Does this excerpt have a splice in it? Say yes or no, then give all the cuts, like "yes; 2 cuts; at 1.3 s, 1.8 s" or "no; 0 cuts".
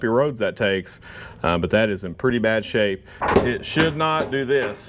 yes; 1 cut; at 3.1 s